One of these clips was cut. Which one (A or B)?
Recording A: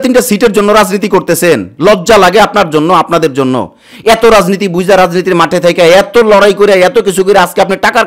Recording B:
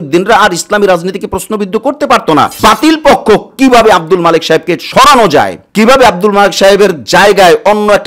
B